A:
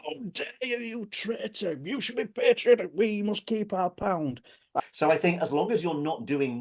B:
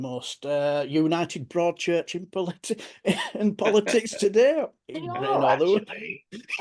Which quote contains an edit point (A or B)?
A